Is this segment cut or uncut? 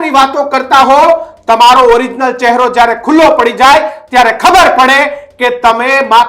uncut